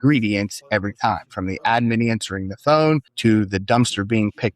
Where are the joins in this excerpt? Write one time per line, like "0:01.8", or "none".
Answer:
0:03.1